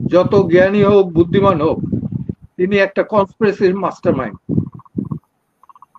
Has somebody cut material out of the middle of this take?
no; 0 cuts

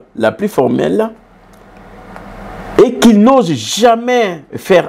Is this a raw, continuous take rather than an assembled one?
yes; 0 cuts

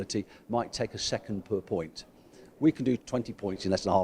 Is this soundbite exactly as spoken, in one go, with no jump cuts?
no; 1 cut; at 3.0 s

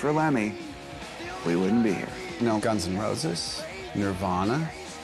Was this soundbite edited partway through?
yes; 1 cut; at 2.5 s

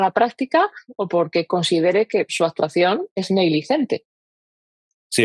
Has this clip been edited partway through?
no; 0 cuts

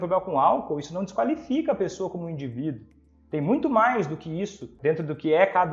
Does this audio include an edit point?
yes; 1 cut; at 4.7 s

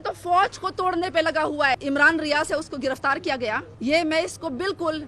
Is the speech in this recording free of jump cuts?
no; 2 cuts; at 1.8 s, 3.7 s

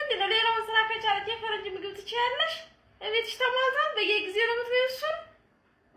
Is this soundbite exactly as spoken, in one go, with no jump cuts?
yes; 0 cuts

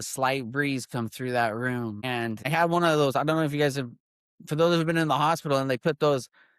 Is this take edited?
yes; 1 cut; at 2.5 s

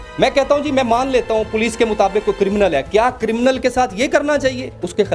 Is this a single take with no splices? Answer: yes; 0 cuts

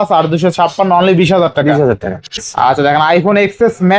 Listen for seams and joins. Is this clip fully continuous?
no; 1 cut; at 2.3 s

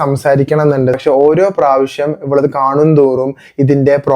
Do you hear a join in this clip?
yes; 1 cut; at 1.0 s

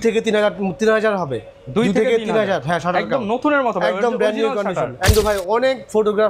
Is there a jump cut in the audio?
yes; 1 cut; at 5.1 s

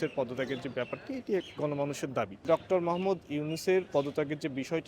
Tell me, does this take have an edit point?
yes; 1 cut; at 2.4 s

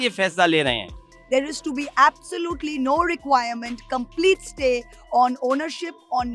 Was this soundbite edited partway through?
yes; 1 cut; at 1.2 s

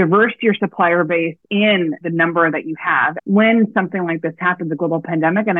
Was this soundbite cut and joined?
yes; 1 cut; at 3.1 s

